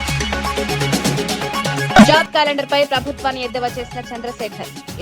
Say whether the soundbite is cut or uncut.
cut